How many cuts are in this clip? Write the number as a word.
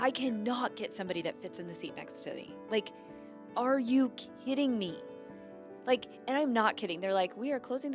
zero